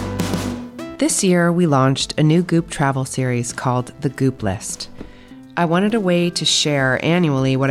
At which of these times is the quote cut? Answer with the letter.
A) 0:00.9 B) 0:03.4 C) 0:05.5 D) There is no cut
A